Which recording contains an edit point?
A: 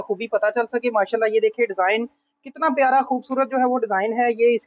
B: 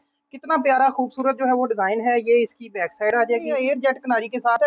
B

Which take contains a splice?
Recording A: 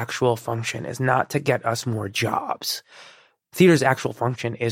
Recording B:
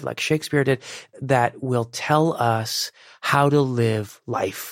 B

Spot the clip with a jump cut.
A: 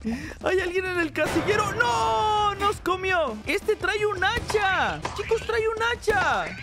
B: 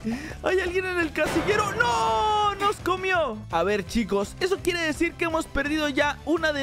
A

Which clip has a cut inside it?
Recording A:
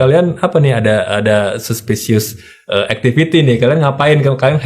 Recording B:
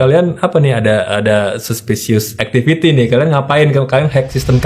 B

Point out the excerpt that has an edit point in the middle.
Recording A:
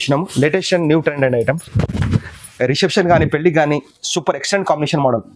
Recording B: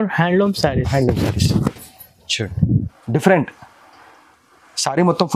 B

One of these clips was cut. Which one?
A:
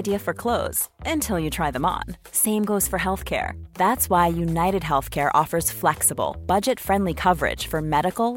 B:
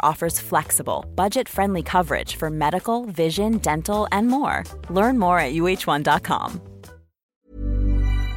B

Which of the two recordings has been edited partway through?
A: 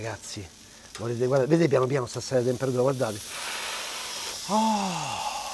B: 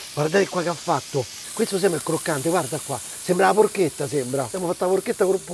B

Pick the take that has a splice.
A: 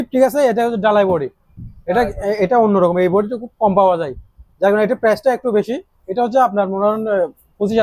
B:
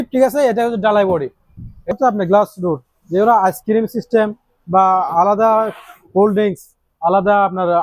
B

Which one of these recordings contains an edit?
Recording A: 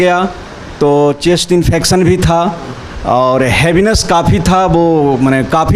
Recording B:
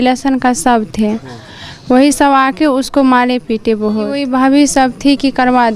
B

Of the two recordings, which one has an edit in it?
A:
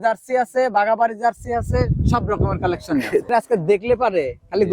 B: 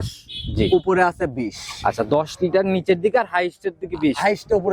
A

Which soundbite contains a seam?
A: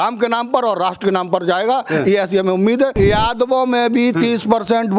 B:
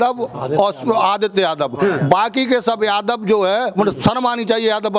A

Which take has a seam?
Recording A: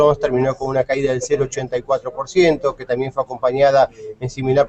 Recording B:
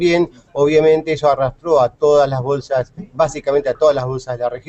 A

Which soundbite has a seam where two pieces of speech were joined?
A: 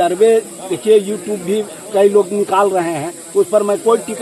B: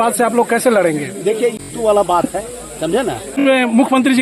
B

